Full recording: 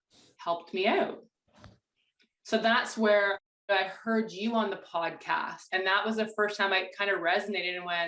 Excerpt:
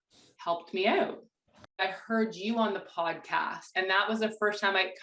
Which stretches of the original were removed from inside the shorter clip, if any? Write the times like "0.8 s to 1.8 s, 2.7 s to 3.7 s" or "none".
1.8 s to 3.8 s